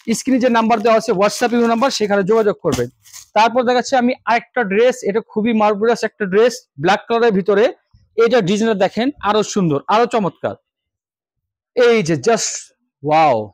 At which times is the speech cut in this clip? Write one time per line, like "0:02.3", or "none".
none